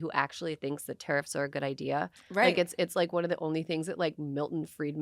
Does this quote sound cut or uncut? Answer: uncut